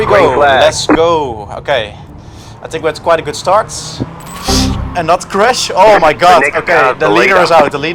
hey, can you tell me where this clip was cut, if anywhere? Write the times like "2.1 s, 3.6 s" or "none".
4.3 s